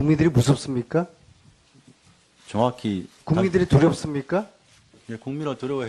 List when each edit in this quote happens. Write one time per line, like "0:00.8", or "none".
0:03.5